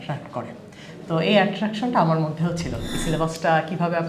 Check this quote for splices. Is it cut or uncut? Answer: cut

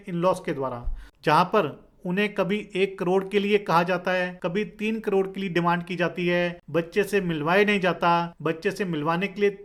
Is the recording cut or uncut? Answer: uncut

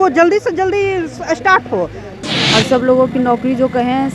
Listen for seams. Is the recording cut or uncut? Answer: cut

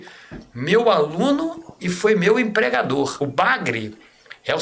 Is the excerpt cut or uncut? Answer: cut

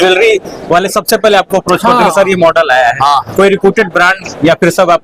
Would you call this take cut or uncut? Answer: uncut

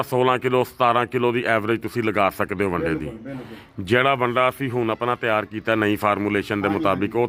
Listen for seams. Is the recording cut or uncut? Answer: uncut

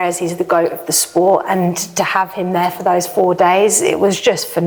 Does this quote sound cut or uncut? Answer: uncut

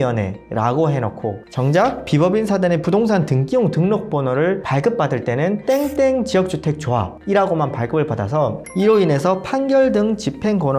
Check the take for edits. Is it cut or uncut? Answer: cut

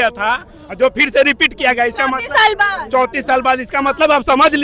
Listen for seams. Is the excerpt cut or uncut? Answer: uncut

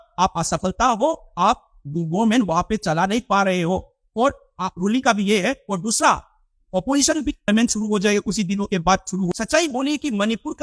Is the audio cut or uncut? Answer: cut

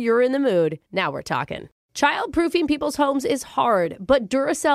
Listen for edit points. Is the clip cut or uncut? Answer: cut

